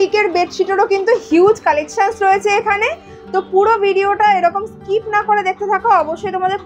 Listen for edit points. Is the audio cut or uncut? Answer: uncut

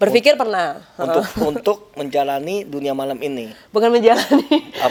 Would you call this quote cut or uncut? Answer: uncut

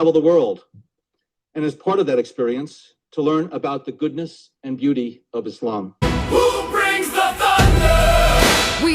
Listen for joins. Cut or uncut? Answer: cut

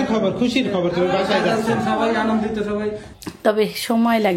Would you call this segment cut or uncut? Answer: cut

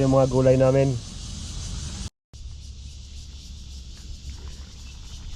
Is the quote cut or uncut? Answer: cut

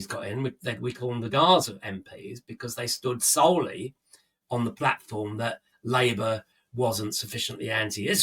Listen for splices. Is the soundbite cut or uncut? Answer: uncut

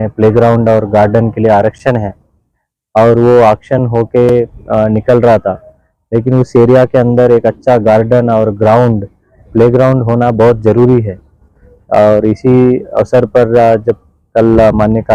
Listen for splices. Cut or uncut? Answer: uncut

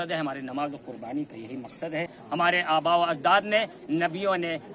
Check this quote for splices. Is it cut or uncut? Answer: cut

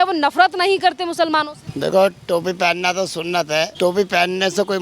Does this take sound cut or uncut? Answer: cut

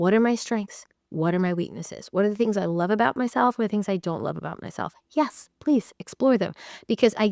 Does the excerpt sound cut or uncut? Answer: uncut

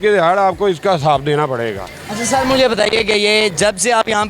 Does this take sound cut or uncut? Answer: uncut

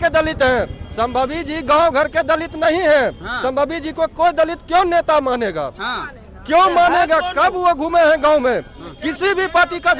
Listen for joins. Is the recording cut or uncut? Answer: uncut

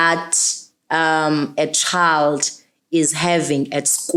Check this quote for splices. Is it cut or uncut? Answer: uncut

